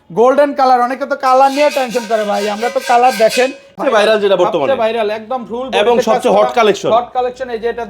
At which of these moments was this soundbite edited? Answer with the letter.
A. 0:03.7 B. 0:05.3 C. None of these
A